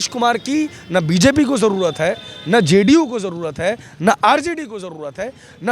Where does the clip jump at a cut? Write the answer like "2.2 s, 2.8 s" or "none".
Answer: none